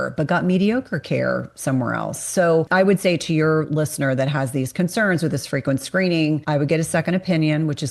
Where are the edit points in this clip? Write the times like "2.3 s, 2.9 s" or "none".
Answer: 2.7 s